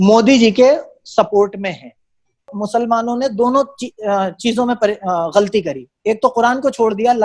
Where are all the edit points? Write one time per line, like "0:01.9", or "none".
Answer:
0:02.5